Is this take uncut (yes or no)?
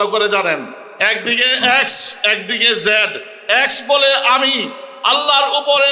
yes